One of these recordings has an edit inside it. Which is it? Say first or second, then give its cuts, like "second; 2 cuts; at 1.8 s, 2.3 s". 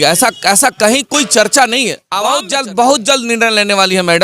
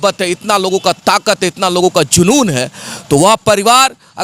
first; 1 cut; at 2.0 s